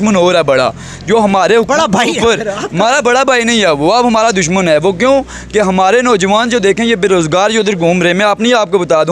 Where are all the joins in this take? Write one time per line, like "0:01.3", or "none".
none